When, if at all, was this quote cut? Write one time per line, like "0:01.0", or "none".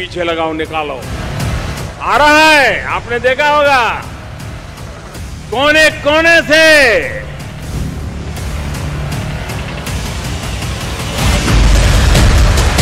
0:11.7